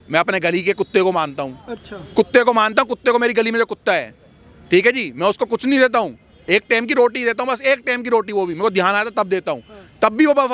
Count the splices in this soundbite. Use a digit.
0